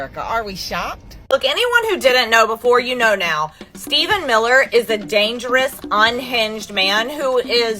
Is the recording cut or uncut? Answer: cut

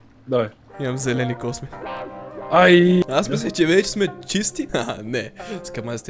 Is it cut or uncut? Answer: cut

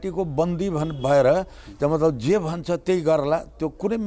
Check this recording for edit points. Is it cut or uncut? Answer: uncut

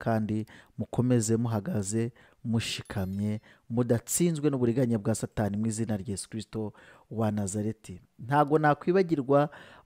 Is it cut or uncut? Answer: uncut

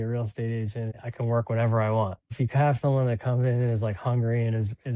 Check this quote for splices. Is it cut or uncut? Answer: cut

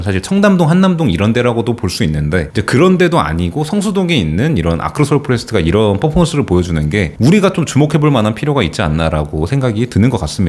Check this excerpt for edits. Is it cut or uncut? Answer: uncut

